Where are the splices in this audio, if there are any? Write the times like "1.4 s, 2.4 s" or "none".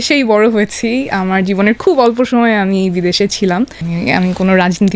3.8 s